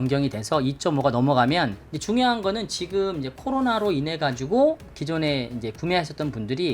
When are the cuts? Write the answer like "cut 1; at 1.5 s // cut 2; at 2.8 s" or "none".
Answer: cut 1; at 1.9 s